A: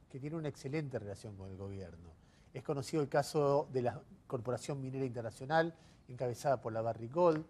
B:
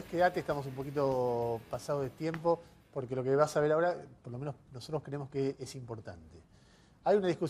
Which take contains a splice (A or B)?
A